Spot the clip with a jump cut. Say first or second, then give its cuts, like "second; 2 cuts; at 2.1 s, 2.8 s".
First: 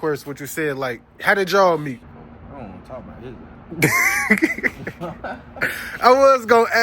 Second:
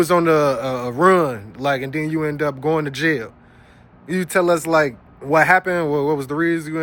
first; 1 cut; at 2.1 s